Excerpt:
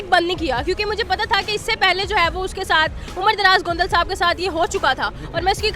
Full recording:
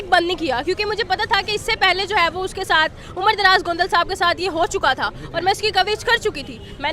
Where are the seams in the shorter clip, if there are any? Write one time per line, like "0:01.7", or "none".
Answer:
none